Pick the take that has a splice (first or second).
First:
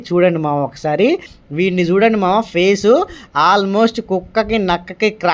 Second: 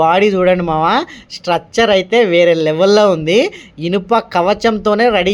first